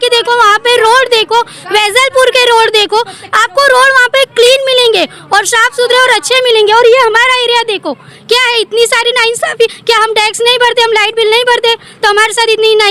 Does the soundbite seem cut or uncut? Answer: uncut